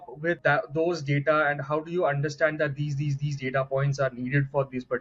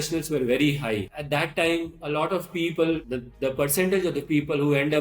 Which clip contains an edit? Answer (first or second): second